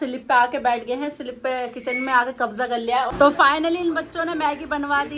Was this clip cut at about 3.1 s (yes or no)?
yes